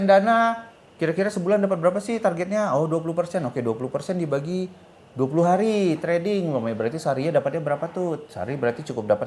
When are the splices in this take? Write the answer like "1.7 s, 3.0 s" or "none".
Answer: none